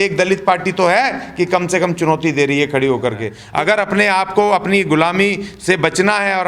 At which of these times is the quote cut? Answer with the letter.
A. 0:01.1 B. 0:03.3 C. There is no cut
B